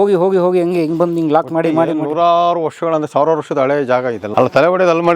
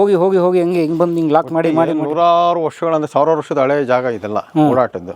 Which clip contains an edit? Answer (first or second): first